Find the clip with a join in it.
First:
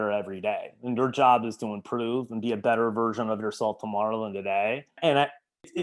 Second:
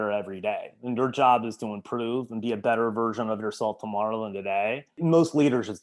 second; 1 cut; at 4.9 s

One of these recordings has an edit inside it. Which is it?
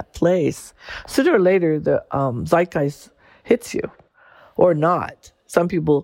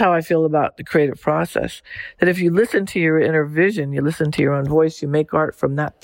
first; 1 cut; at 4.2 s

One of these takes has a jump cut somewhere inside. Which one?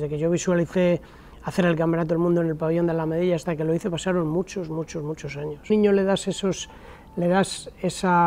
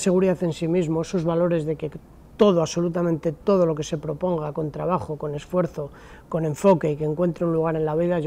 first; 1 cut; at 5.7 s

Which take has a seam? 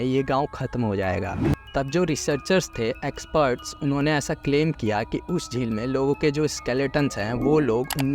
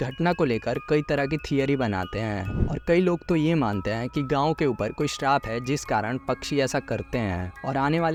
first; 1 cut; at 1.5 s

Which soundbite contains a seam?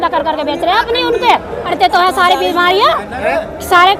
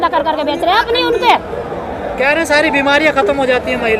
first; 1 cut; at 1.7 s

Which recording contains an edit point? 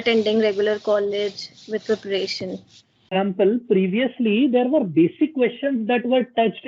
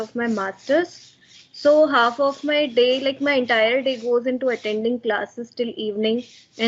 first; 1 cut; at 3.1 s

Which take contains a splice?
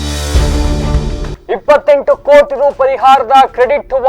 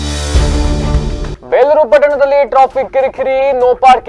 first; 1 cut; at 1.2 s

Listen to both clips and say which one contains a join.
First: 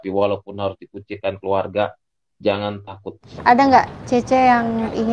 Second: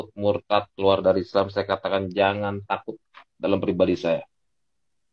first; 1 cut; at 3.3 s

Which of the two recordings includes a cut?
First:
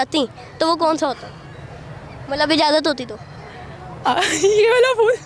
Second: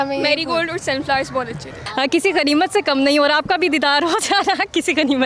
second; 1 cut; at 1.8 s

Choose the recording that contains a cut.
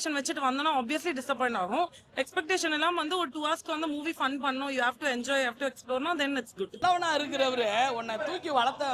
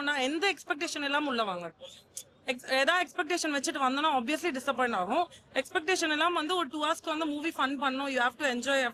first; 1 cut; at 6.8 s

